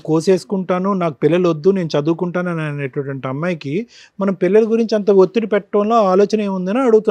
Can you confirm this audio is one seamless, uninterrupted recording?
yes; 0 cuts

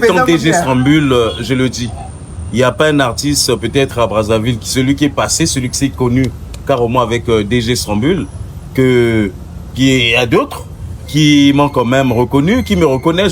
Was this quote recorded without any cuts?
yes; 0 cuts

